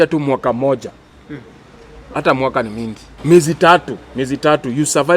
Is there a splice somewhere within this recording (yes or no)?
yes